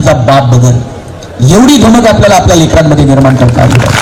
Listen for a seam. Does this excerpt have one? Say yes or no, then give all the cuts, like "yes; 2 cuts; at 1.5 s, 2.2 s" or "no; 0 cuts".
no; 0 cuts